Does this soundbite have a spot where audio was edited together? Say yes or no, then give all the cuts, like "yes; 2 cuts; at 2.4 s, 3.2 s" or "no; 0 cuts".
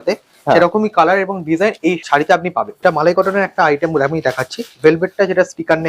yes; 2 cuts; at 2.0 s, 2.8 s